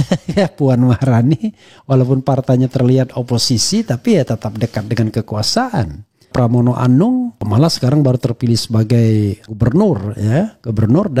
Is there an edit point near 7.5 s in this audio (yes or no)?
yes